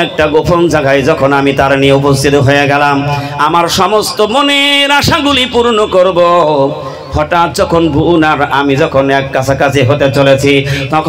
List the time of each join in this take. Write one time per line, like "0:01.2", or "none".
none